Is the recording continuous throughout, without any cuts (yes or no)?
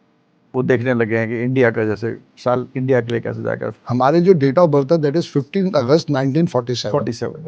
no